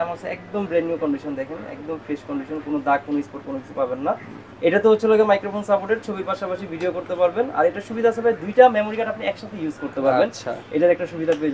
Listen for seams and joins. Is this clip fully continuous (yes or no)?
yes